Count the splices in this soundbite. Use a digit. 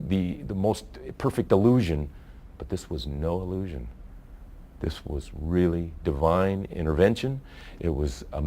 1